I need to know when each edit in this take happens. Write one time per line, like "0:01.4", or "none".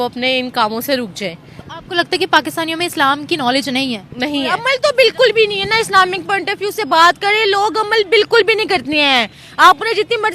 0:04.6